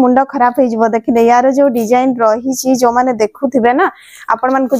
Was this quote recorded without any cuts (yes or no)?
yes